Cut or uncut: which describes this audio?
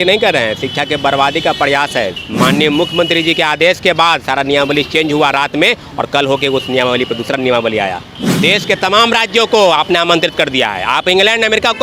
cut